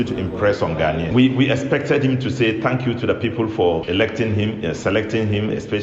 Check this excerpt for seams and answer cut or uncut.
cut